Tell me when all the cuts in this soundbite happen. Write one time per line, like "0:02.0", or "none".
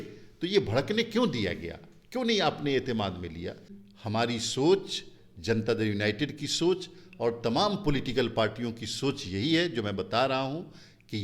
0:03.7